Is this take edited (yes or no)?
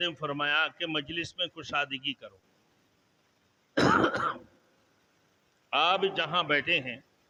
no